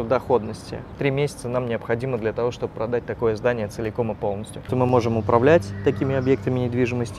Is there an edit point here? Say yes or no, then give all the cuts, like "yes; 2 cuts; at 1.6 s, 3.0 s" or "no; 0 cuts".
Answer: yes; 2 cuts; at 0.9 s, 4.7 s